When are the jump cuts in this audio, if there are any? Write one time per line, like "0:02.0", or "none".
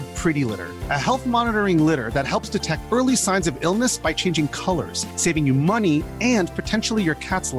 none